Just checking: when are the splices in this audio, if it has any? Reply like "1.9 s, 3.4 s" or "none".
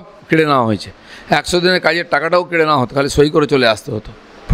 none